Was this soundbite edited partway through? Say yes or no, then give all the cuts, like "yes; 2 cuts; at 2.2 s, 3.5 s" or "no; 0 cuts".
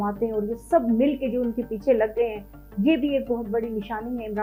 no; 0 cuts